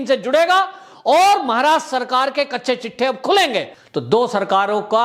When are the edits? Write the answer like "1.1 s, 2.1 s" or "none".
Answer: 3.8 s